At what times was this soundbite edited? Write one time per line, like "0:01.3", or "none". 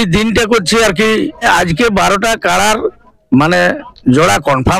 0:01.4